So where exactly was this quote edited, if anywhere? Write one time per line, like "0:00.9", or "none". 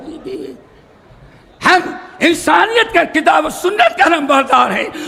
none